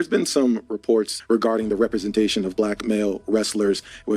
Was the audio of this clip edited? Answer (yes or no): yes